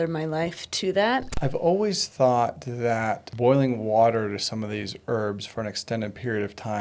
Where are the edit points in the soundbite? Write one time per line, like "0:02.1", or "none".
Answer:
0:01.3
0:03.3

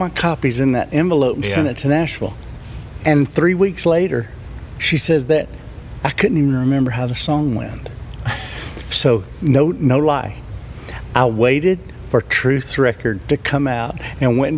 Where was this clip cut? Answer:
0:03.0

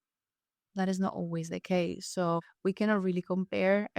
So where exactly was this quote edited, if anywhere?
0:02.5

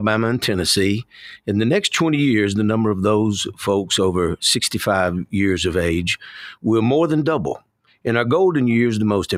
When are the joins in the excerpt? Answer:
none

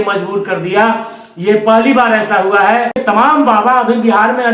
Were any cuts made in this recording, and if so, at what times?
0:03.0

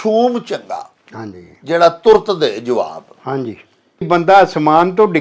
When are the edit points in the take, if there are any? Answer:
0:04.1

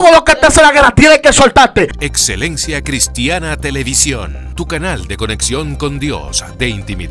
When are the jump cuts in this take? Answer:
0:02.0

